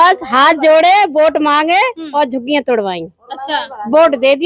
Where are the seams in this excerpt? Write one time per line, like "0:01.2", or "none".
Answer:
none